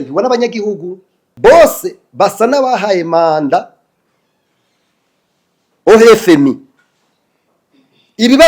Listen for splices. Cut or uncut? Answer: cut